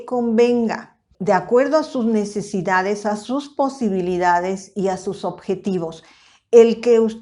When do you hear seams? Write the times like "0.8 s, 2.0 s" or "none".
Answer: 1.1 s